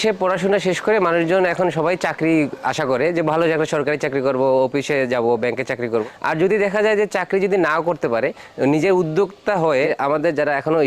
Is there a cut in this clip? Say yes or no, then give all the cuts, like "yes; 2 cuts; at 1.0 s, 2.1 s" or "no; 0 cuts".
yes; 2 cuts; at 6.0 s, 9.9 s